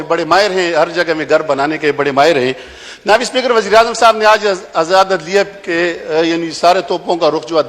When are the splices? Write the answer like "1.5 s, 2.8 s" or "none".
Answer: none